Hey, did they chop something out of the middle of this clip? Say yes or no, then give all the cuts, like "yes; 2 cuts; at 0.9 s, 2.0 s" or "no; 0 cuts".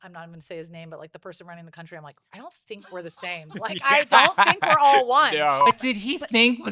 yes; 1 cut; at 5.7 s